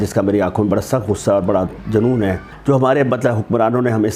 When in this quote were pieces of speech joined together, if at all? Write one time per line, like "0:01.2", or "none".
0:02.5